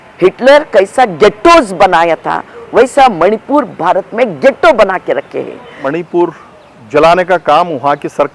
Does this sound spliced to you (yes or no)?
yes